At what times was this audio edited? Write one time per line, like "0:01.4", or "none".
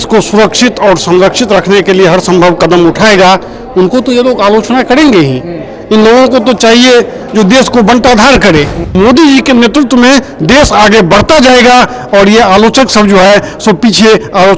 0:08.8